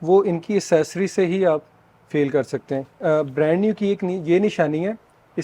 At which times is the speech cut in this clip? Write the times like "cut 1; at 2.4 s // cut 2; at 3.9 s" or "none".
cut 1; at 3.0 s

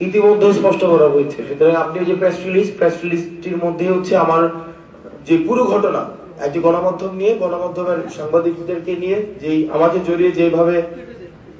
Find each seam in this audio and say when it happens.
none

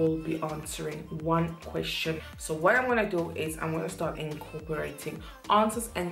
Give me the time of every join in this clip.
cut 1; at 2.2 s

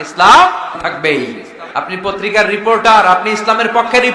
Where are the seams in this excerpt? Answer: cut 1; at 0.8 s // cut 2; at 1.6 s

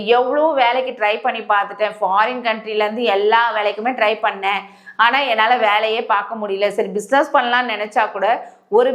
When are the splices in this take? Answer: none

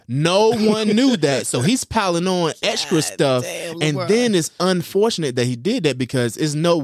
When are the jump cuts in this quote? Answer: none

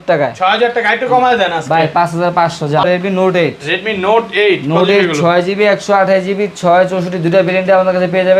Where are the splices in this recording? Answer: cut 1; at 2.8 s

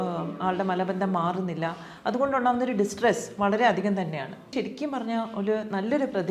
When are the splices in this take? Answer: cut 1; at 4.5 s

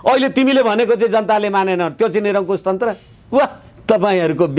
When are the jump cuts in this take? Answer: none

